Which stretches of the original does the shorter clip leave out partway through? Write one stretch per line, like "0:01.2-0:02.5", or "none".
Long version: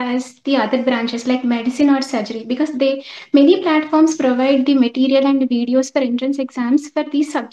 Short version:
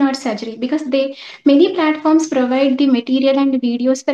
none